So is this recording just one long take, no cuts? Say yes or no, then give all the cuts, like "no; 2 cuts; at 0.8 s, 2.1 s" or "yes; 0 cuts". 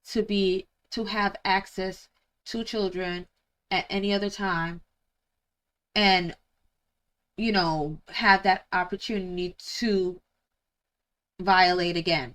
yes; 0 cuts